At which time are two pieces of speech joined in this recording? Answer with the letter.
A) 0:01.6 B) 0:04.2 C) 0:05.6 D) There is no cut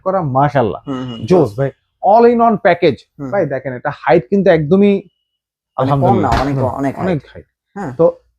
D